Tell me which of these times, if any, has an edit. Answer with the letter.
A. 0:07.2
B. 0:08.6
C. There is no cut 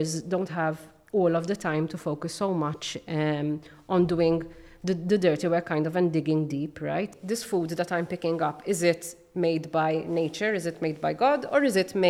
A